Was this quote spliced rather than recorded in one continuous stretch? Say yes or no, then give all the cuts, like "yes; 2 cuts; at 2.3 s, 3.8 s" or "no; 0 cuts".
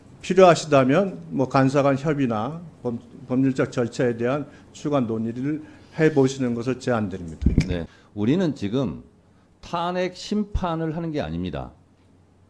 yes; 1 cut; at 8.0 s